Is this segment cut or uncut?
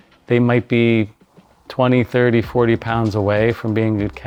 uncut